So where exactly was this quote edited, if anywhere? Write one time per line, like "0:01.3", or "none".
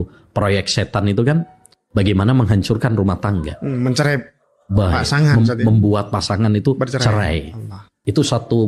none

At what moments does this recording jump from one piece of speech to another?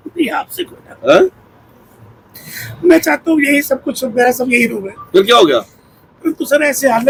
none

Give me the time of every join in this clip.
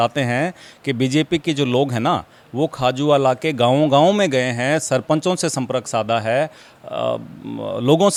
none

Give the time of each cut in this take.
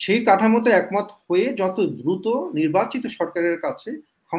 none

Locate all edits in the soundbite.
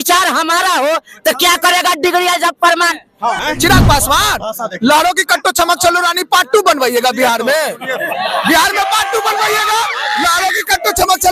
0:03.4

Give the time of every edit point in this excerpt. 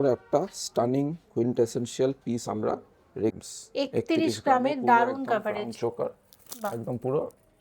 0:03.3

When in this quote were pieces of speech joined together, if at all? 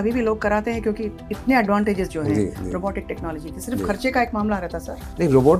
none

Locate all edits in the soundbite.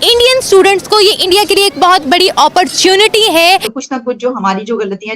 0:03.7

